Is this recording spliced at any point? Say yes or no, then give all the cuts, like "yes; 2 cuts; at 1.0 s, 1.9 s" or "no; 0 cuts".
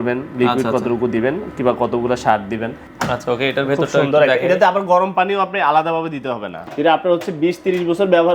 yes; 2 cuts; at 2.8 s, 6.7 s